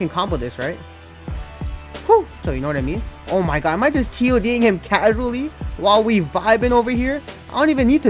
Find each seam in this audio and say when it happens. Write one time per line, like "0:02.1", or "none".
0:02.5